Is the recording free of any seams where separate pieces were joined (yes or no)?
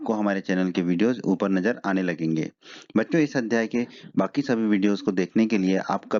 yes